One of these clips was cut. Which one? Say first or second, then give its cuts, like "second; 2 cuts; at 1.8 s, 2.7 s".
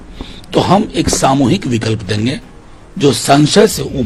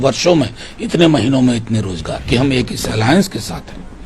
second; 1 cut; at 2.2 s